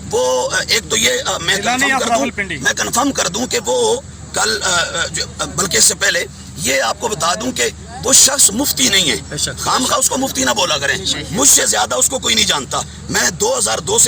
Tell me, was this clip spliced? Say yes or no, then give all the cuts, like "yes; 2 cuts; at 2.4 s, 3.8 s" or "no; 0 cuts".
no; 0 cuts